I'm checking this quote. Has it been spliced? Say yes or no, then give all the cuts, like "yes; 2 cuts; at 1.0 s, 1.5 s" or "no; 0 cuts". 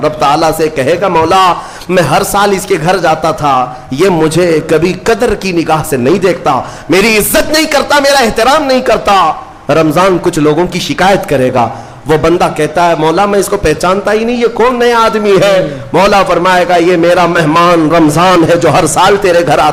no; 0 cuts